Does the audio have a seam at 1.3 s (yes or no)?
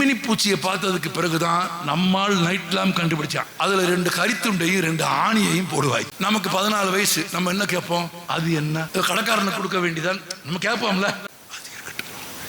no